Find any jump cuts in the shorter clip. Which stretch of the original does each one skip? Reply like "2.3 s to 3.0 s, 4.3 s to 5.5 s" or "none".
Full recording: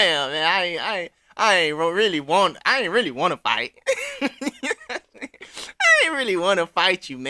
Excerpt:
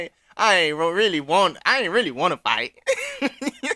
none

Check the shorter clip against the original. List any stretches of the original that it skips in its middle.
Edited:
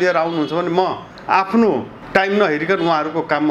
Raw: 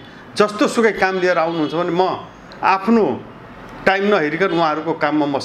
2.3 s to 2.4 s, 3.3 s to 3.7 s

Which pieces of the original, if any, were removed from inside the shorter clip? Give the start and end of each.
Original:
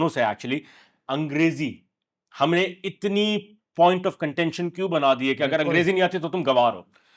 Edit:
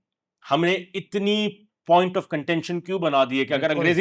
none

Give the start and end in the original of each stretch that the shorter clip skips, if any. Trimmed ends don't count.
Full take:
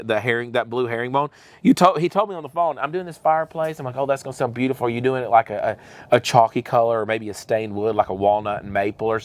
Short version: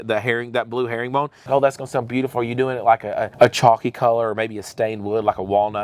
1.4 s to 3.8 s, 5.7 s to 6.0 s

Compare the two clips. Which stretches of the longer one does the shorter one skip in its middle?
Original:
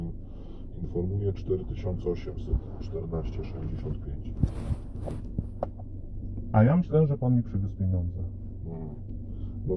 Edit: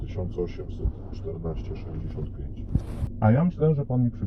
4.8 s to 6.4 s

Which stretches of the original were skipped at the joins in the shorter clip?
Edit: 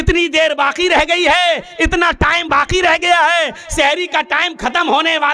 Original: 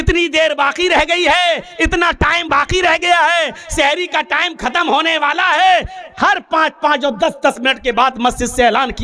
none

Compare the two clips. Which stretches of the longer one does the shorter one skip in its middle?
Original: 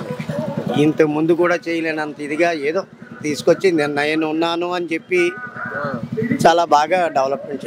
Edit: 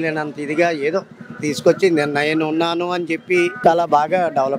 5.4 s to 6.4 s

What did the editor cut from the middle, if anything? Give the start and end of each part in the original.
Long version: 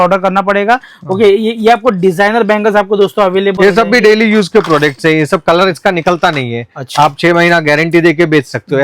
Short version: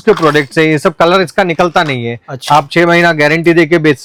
none

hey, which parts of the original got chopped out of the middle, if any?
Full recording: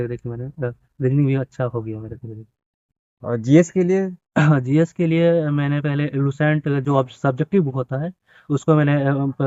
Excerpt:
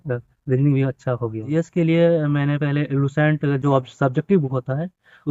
2.0 s to 4.7 s

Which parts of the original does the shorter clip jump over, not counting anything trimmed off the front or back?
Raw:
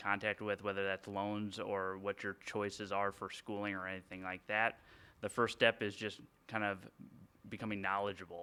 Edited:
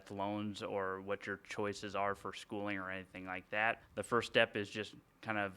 4.8 s to 5.1 s

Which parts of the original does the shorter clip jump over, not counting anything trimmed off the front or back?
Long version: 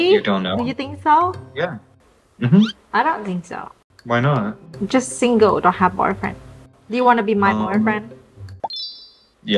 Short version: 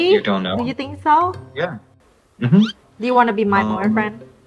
2.8 s to 6.7 s

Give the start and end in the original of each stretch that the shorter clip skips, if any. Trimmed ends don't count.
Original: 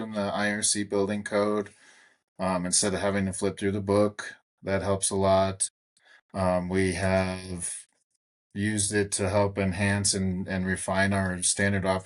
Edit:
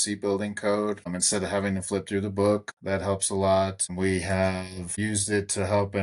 1.9 s to 2.7 s, 4.2 s to 4.5 s, 5.7 s to 6.7 s, 7.6 s to 8.5 s

